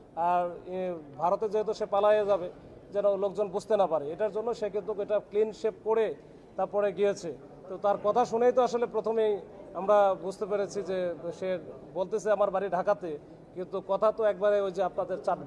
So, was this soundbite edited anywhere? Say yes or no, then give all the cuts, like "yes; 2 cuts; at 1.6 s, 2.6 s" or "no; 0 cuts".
no; 0 cuts